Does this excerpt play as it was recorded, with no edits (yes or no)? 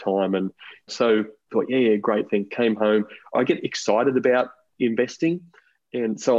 no